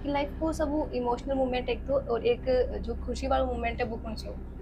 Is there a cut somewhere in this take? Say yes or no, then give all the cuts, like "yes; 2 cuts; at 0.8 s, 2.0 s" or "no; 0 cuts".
no; 0 cuts